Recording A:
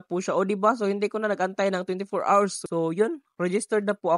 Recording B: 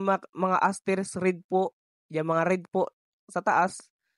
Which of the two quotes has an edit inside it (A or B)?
A